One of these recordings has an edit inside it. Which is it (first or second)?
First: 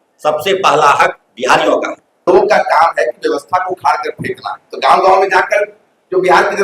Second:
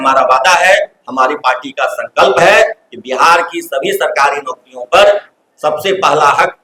first